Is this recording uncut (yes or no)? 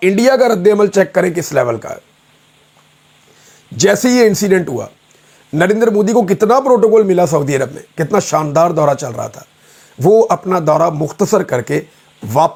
yes